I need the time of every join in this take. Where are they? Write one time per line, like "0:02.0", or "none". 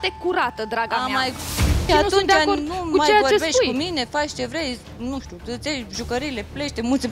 0:01.9